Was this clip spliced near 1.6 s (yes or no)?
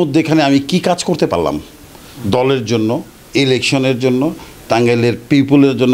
no